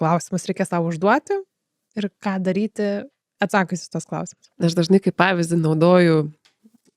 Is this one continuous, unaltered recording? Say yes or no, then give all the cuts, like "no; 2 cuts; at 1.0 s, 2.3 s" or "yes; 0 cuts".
yes; 0 cuts